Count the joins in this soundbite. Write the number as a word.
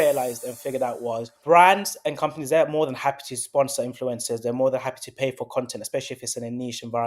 one